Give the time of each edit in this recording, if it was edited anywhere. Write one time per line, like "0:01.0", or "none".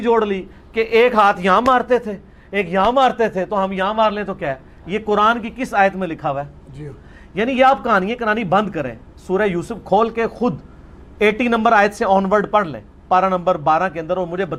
none

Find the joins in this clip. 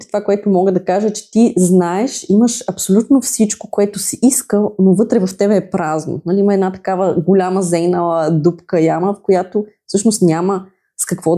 none

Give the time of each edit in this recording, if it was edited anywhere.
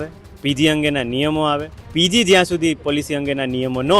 0:01.8

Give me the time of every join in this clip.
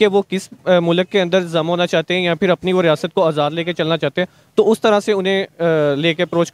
none

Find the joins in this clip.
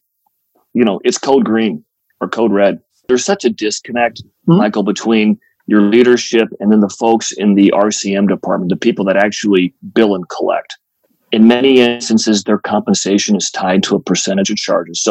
0:03.1

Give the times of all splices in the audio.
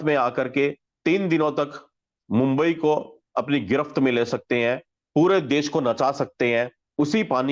none

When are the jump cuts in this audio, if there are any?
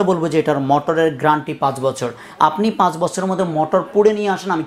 none

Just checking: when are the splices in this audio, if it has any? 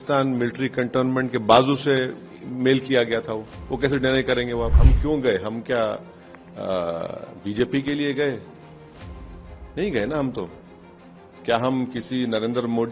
0:04.8

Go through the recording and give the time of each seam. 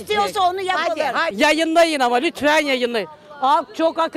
0:01.3

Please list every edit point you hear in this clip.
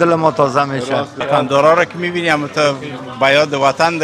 0:01.2

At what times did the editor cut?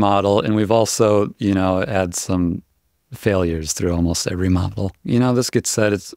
0:04.9

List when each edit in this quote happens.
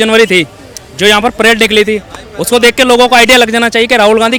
none

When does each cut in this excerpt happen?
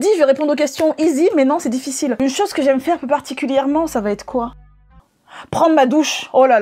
none

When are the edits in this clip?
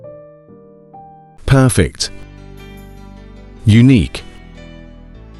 0:01.3

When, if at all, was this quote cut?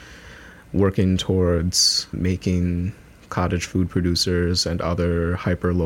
0:02.1

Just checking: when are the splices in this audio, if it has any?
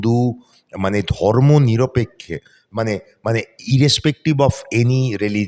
none

